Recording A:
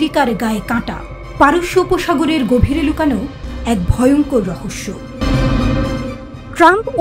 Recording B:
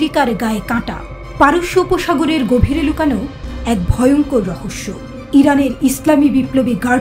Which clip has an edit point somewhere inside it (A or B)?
A